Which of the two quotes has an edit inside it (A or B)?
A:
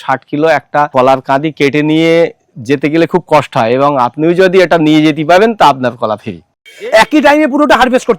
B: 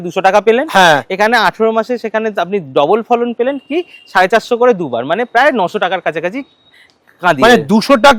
A